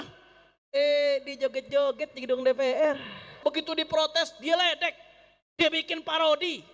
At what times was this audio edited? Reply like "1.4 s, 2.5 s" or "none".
3.4 s